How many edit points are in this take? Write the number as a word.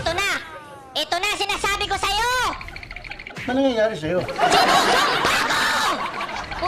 zero